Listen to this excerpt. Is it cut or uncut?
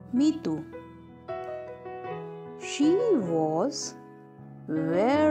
cut